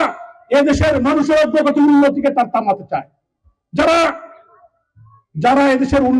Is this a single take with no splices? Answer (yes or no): yes